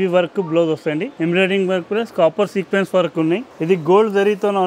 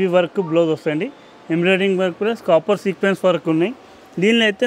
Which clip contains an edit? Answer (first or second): first